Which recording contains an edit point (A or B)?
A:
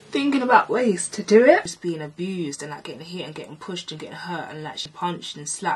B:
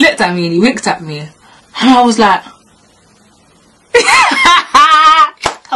A